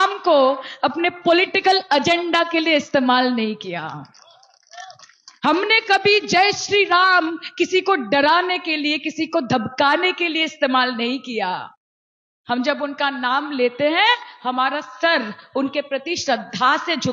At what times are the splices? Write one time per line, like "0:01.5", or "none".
none